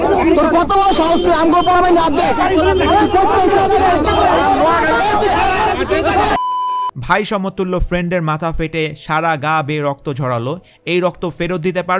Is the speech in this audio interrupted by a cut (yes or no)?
yes